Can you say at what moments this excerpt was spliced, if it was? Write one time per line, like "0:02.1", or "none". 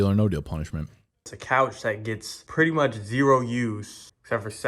0:01.3